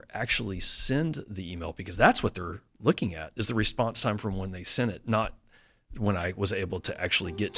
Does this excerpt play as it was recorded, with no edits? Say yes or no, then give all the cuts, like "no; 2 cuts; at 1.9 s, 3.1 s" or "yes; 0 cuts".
yes; 0 cuts